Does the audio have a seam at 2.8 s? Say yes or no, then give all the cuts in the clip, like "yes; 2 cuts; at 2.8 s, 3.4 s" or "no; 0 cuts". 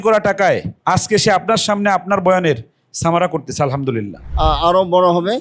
no; 1 cut; at 4.2 s